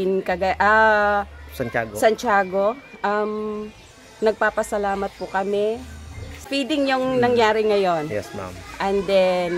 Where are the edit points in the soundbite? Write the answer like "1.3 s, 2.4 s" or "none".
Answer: 6.5 s